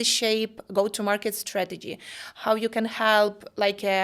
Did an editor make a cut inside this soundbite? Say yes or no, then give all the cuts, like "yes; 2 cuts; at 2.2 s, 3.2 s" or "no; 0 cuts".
no; 0 cuts